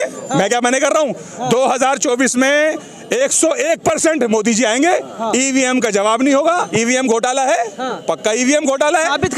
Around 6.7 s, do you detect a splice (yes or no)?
yes